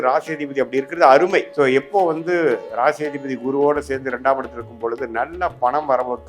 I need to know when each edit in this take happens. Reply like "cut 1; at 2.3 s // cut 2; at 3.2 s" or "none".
cut 1; at 1.5 s